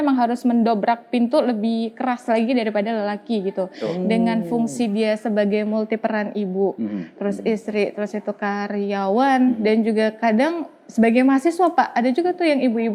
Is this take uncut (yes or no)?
yes